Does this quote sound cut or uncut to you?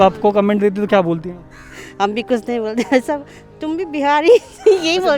uncut